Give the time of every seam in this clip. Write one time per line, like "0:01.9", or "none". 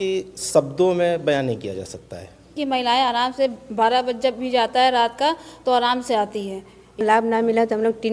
0:02.6
0:07.0